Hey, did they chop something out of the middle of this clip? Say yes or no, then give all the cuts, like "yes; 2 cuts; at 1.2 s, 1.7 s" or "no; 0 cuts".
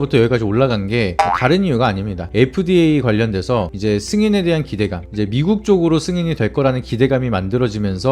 no; 0 cuts